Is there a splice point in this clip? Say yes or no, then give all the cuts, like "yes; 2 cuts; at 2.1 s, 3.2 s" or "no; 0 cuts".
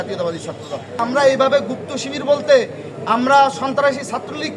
yes; 1 cut; at 1.0 s